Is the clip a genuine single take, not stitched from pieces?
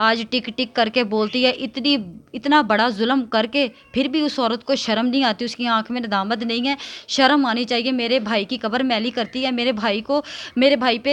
yes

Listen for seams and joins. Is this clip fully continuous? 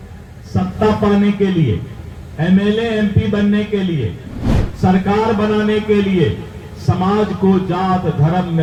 yes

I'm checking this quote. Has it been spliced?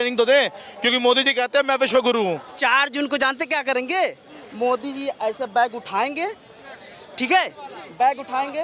yes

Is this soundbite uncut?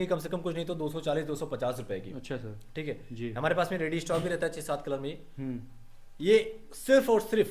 yes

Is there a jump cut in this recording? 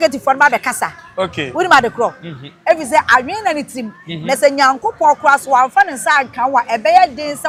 no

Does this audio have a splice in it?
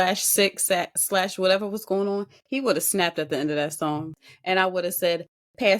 yes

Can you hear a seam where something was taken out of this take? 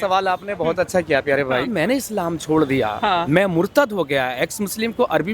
yes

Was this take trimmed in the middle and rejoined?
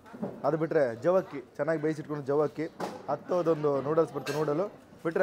no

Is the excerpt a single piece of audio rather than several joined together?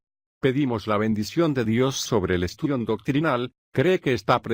yes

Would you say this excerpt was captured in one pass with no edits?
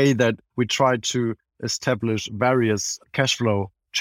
yes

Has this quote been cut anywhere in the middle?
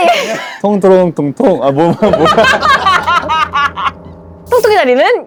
no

